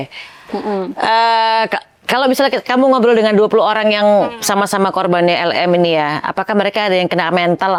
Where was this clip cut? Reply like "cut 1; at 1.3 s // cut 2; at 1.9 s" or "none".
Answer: none